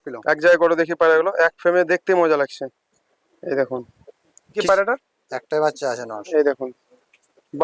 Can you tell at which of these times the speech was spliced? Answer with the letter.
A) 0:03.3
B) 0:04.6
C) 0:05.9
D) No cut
B